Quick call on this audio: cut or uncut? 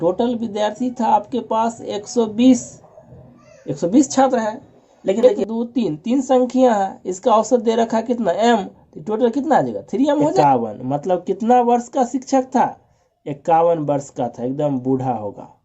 cut